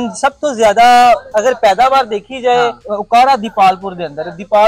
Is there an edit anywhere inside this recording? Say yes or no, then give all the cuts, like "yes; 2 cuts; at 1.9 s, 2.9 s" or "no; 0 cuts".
yes; 1 cut; at 2.9 s